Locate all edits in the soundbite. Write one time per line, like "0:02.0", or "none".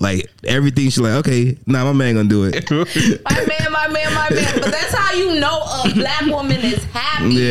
0:02.5